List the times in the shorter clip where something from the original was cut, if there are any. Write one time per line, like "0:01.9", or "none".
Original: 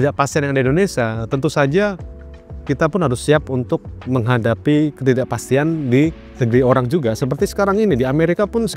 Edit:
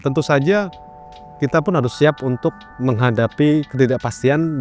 none